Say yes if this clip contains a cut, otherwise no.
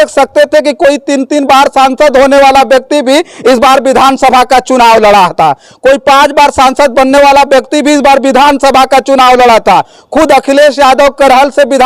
no